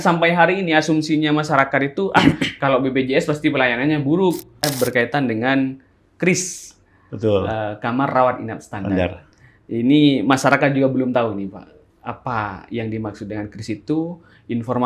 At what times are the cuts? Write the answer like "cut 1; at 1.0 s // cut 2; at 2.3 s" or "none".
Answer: cut 1; at 4.6 s